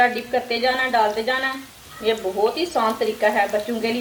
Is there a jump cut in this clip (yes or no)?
no